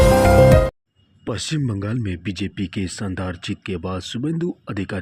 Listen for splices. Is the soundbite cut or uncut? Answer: cut